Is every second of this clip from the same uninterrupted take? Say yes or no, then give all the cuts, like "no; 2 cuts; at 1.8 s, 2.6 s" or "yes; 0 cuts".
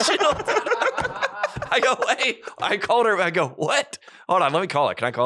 yes; 0 cuts